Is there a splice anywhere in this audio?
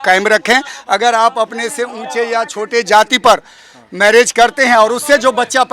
no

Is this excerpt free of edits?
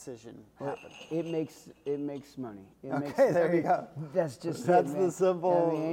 yes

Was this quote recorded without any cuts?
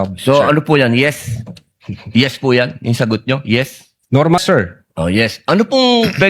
no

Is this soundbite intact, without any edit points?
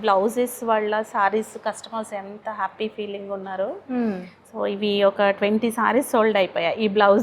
yes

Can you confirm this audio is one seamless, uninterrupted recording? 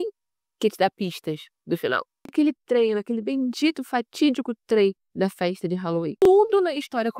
no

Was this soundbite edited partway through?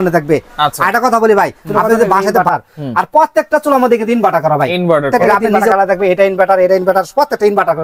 yes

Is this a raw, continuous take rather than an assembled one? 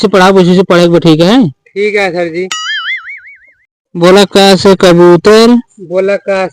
yes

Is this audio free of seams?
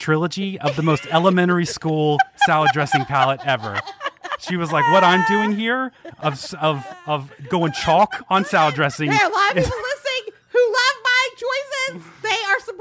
yes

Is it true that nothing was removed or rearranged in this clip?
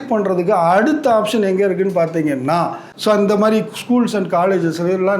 no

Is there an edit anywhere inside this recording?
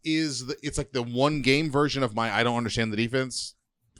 no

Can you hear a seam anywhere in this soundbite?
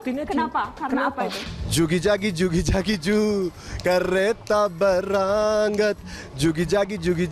yes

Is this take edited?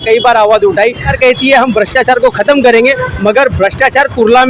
yes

